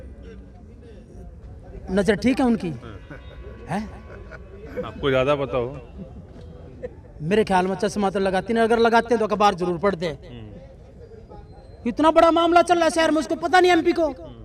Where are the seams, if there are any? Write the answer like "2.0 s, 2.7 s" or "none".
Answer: none